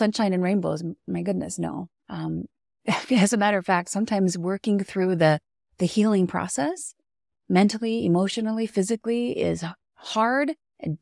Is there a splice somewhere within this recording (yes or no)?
yes